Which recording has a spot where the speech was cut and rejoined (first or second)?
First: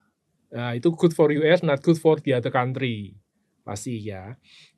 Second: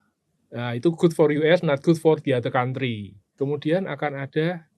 second